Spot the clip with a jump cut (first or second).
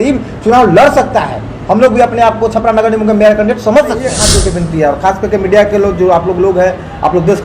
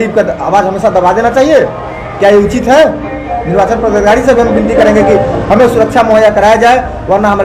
first